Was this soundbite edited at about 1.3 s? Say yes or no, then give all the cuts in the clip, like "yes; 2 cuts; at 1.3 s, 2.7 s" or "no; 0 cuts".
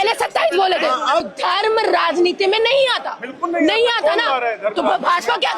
yes; 1 cut; at 1.3 s